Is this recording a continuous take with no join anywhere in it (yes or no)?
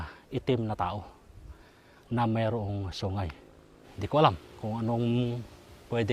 no